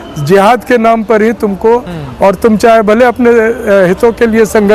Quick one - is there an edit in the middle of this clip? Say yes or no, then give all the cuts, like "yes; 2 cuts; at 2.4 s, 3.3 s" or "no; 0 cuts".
no; 0 cuts